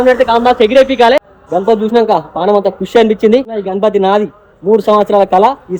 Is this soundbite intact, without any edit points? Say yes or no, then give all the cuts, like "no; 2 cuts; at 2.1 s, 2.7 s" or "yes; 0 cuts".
no; 2 cuts; at 1.4 s, 3.5 s